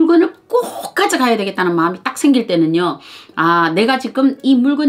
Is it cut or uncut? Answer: uncut